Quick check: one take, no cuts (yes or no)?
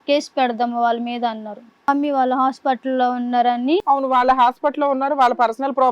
no